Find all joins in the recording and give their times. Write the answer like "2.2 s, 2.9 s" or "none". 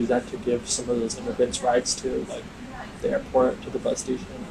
none